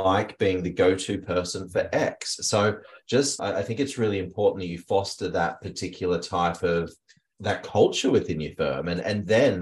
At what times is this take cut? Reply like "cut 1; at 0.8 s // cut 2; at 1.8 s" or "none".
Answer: none